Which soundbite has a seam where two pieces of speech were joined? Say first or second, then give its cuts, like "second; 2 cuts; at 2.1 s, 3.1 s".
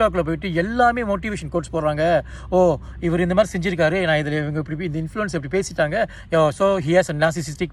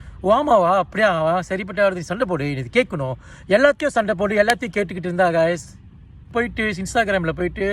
second; 1 cut; at 6.3 s